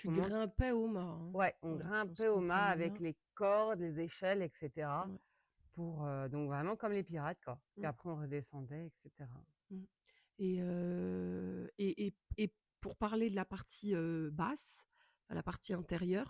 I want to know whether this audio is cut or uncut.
uncut